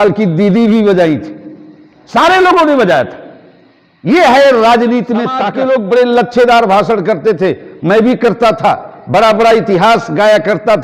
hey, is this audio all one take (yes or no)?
no